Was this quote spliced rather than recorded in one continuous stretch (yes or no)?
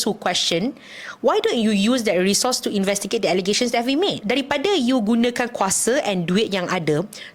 yes